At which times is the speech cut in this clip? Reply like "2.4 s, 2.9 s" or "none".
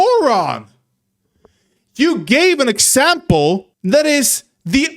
3.7 s

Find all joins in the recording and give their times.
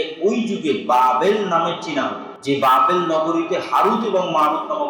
2.3 s

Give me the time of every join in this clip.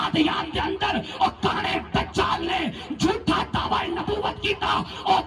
none

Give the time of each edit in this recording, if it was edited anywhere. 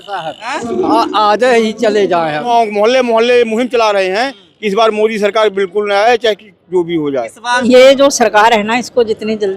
2.5 s, 7.5 s

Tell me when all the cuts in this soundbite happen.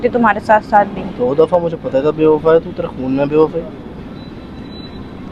none

